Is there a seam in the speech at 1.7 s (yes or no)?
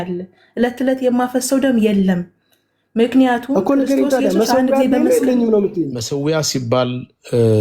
no